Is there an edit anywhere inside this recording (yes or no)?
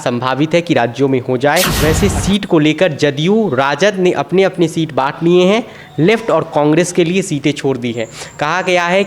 yes